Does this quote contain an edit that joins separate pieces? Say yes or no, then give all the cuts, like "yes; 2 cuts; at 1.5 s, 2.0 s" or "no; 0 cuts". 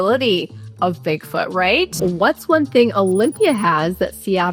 yes; 1 cut; at 1.9 s